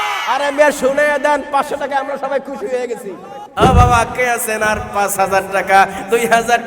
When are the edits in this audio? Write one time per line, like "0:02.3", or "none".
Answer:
0:03.3